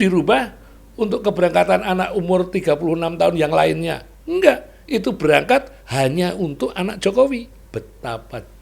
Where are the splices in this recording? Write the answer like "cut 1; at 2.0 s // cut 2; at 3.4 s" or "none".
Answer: cut 1; at 7.6 s